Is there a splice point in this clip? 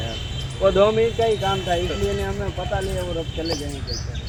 no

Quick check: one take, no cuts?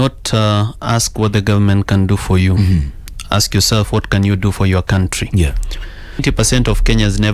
no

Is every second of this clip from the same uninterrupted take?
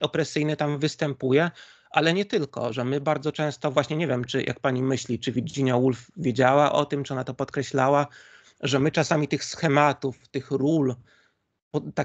yes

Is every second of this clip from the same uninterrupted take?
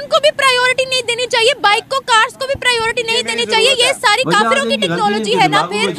yes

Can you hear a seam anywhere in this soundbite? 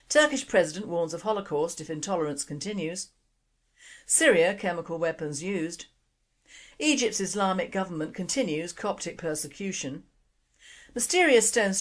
yes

